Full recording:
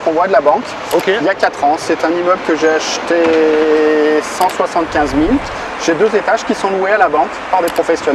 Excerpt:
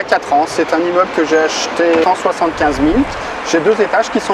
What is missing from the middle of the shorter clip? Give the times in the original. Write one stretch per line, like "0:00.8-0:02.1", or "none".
0:03.3-0:04.4